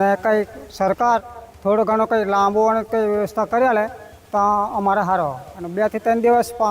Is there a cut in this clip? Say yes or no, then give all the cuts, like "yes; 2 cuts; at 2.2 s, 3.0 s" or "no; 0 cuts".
no; 0 cuts